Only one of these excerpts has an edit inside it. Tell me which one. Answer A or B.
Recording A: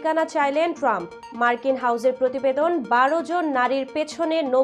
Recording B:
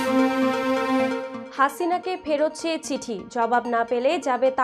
B